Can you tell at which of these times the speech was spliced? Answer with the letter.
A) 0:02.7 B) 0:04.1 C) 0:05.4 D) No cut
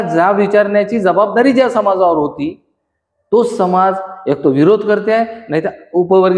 D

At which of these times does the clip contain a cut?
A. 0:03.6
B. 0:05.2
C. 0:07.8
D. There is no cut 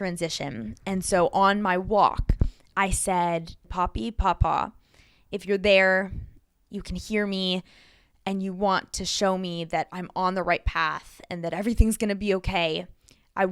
A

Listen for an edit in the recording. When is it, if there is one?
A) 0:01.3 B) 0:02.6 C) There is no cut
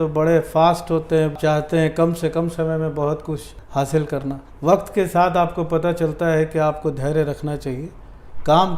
A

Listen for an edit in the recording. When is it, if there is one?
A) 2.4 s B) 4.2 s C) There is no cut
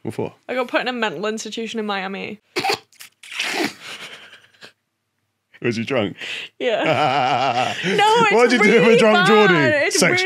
A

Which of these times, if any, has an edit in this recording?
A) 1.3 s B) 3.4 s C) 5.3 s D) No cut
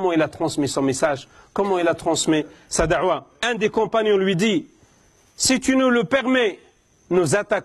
B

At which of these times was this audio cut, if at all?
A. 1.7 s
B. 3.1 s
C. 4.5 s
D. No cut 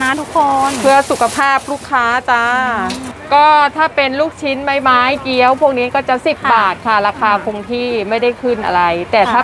B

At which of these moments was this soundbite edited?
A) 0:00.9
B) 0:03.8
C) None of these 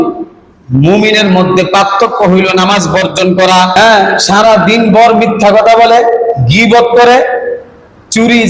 B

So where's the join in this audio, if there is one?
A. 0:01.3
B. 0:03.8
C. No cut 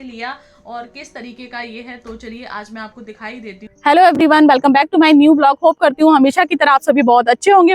B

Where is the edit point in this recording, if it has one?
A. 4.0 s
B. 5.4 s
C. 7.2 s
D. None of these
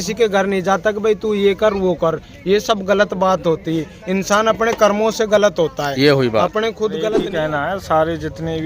C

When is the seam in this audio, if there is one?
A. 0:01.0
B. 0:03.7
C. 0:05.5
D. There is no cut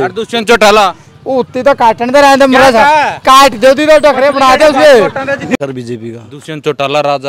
C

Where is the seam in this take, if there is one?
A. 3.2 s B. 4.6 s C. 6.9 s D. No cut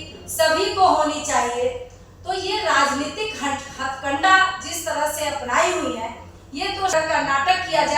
C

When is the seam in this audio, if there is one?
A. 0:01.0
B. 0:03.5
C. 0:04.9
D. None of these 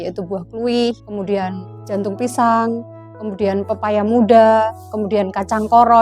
A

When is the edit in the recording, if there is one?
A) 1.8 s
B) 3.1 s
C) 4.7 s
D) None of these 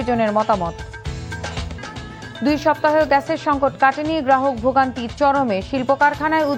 A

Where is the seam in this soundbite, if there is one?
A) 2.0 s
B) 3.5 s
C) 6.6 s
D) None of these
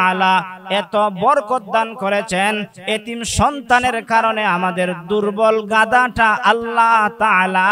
D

